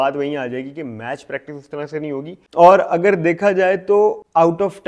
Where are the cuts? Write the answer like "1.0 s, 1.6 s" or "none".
none